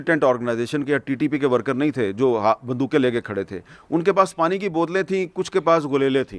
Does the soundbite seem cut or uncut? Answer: uncut